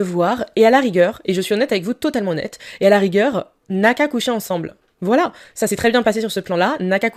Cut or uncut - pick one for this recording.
uncut